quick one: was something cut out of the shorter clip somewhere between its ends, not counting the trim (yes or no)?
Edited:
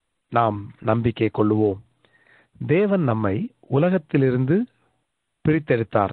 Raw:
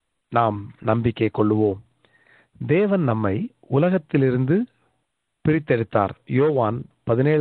no